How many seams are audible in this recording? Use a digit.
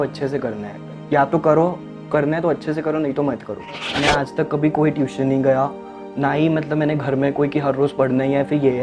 1